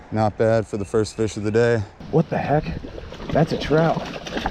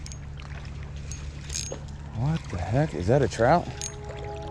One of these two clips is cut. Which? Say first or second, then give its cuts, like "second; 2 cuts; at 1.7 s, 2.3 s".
first; 1 cut; at 1.9 s